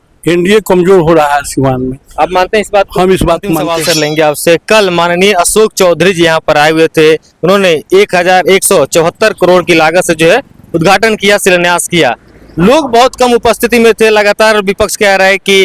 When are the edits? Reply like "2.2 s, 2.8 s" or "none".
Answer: 3.7 s